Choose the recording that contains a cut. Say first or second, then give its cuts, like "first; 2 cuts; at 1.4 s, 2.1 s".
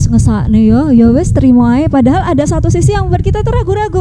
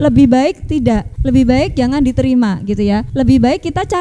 second; 2 cuts; at 1.1 s, 3.1 s